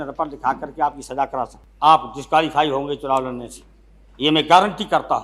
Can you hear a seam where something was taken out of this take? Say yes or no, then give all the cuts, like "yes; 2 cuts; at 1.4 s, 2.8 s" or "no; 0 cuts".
yes; 1 cut; at 1.6 s